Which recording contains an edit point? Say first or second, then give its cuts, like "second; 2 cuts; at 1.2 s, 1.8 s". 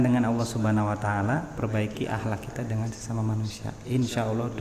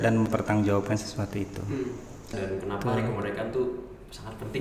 second; 1 cut; at 2.3 s